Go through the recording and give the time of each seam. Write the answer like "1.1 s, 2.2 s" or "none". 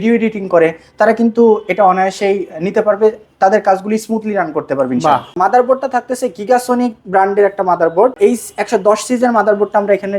5.4 s, 8.2 s